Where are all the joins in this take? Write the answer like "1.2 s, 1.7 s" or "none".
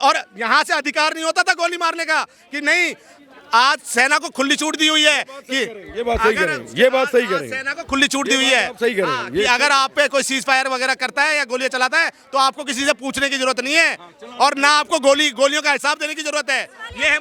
none